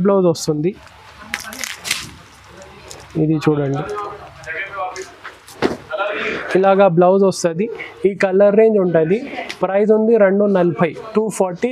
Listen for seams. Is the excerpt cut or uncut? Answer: uncut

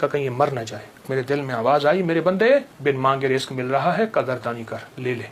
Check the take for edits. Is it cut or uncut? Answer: cut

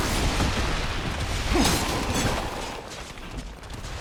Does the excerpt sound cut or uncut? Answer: uncut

